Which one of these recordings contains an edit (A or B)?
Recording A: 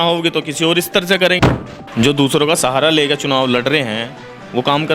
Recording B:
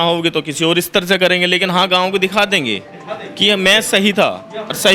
A